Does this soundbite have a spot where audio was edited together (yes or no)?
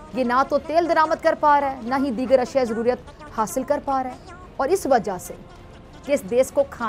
yes